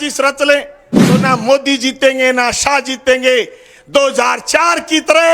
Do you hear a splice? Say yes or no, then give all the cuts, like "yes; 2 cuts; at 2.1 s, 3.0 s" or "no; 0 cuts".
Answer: yes; 1 cut; at 1.2 s